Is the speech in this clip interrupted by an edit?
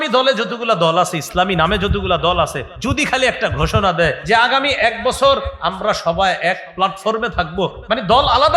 yes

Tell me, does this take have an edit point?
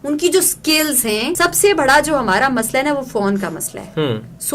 yes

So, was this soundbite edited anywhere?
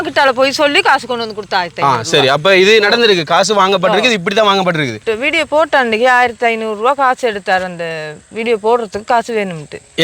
yes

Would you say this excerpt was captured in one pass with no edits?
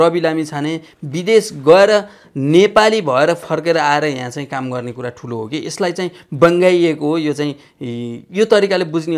yes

